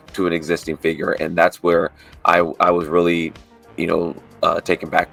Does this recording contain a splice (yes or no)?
no